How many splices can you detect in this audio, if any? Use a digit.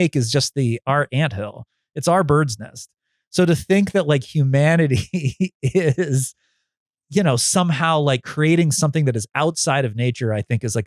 0